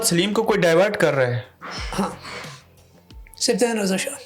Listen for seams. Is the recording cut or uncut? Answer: uncut